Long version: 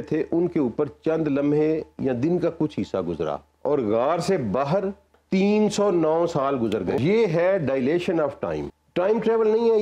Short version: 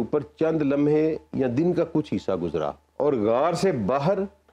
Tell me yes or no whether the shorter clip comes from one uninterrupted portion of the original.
yes